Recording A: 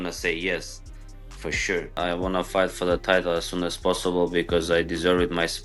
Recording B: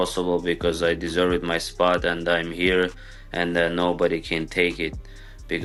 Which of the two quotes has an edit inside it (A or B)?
A